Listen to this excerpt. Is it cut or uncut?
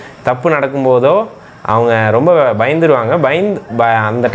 uncut